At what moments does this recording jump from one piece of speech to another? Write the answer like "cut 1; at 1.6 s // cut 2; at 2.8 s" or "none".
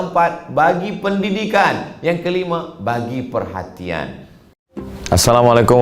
cut 1; at 4.6 s